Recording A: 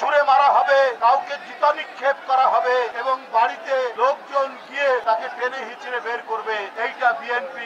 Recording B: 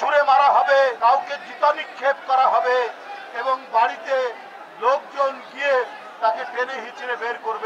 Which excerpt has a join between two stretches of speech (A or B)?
A